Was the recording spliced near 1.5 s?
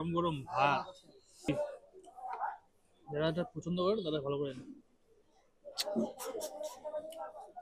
yes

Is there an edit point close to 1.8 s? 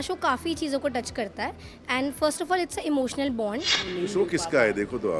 no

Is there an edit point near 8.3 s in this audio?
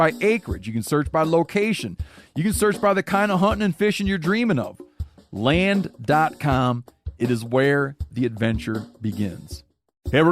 no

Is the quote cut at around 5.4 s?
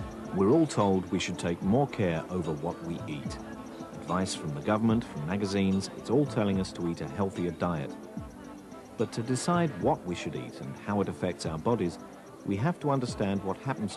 yes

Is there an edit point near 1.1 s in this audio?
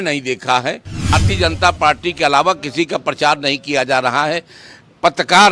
yes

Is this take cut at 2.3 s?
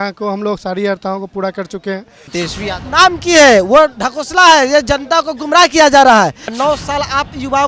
yes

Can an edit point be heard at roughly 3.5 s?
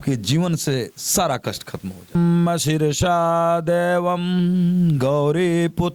no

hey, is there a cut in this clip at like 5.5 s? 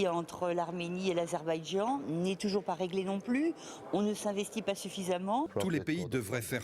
yes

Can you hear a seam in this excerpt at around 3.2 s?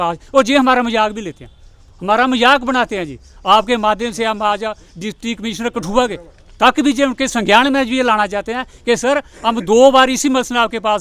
no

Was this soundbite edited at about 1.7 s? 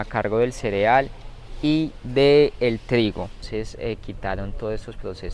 no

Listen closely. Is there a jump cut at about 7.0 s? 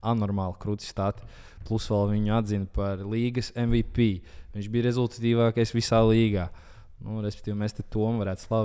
no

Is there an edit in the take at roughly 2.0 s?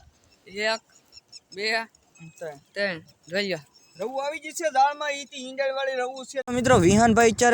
no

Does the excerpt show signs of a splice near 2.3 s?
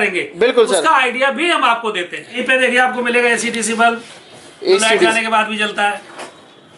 yes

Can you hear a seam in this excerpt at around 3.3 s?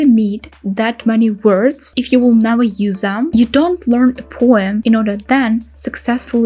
yes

